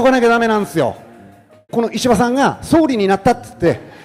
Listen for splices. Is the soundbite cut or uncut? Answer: cut